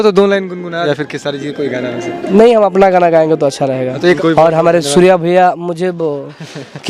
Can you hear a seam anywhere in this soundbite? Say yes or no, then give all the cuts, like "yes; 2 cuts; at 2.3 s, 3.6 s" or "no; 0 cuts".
yes; 2 cuts; at 0.9 s, 4.2 s